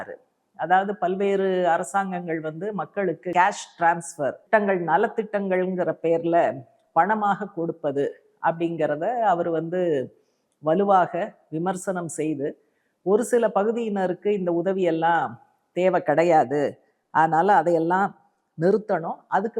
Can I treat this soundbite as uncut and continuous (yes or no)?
no